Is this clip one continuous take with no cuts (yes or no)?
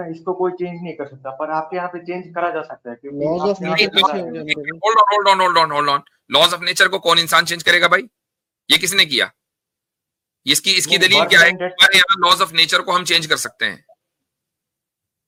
yes